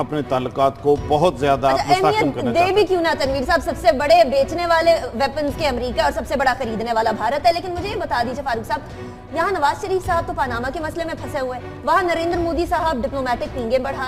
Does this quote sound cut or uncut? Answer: cut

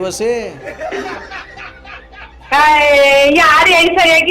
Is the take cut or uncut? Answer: uncut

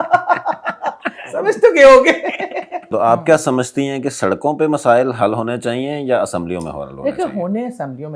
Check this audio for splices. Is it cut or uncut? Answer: cut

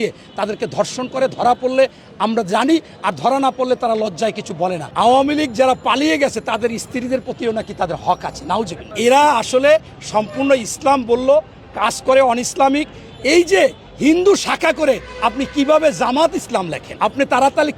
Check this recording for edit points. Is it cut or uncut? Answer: uncut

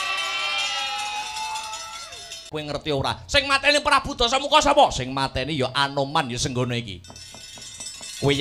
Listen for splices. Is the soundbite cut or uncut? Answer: cut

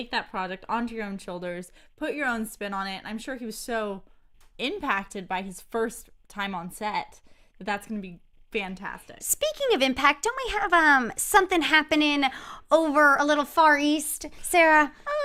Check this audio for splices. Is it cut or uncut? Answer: uncut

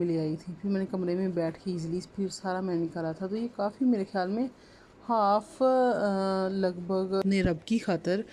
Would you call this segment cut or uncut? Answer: cut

